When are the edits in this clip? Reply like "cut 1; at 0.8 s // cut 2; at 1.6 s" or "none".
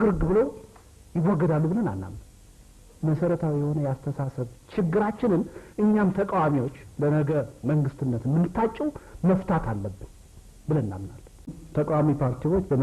cut 1; at 11.6 s